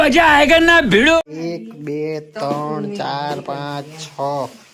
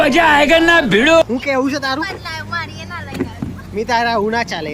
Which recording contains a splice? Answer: second; 1 cut; at 1.3 s

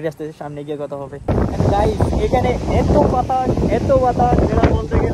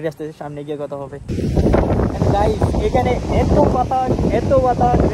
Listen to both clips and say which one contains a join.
first; 1 cut; at 1.3 s

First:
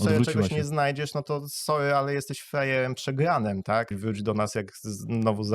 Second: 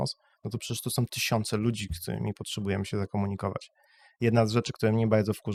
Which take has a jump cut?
first; 1 cut; at 3.9 s

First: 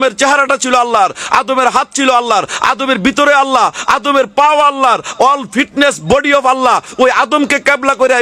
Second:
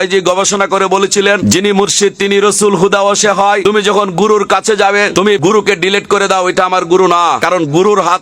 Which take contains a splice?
second; 4 cuts; at 1.4 s, 3.6 s, 5.3 s, 7.4 s

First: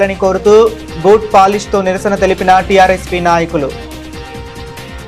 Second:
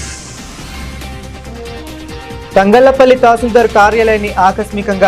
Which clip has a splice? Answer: first; 1 cut; at 3.9 s

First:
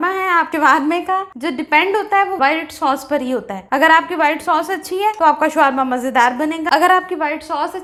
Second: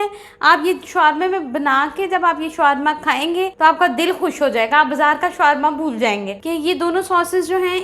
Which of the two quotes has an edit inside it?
second; 2 cuts; at 3.5 s, 6.4 s

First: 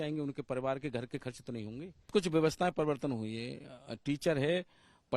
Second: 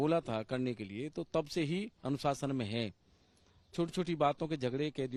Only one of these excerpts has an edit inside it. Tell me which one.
first; 1 cut; at 2.1 s

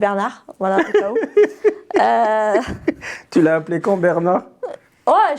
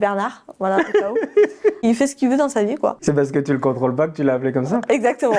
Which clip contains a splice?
second; 2 cuts; at 1.8 s, 3.0 s

